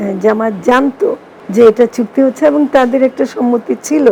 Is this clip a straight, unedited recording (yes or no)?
no